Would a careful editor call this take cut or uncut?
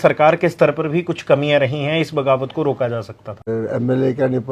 cut